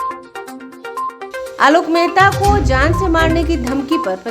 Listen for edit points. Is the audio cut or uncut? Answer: cut